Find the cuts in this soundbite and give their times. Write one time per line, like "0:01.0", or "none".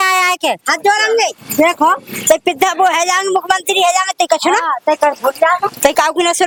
none